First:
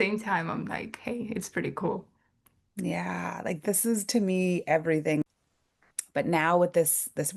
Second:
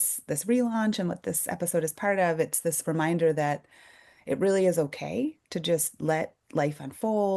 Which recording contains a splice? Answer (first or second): first